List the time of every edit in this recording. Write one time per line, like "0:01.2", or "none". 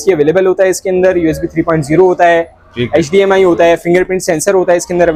none